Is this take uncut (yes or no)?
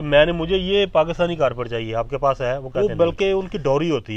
no